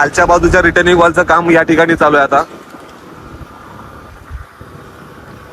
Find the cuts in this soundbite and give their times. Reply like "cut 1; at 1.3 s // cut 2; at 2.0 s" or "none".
none